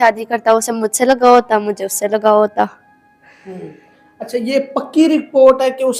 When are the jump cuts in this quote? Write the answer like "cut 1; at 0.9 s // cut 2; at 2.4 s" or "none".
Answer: none